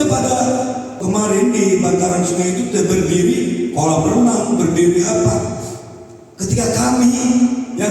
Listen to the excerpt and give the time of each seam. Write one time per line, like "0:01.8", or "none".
0:00.9